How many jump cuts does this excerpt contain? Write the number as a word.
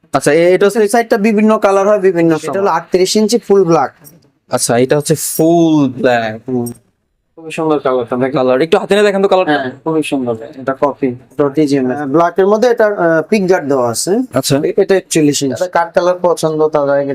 four